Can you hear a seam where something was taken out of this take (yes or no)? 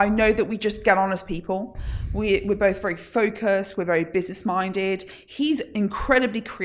no